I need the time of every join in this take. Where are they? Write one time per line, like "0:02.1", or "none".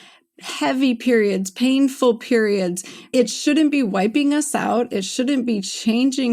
0:03.1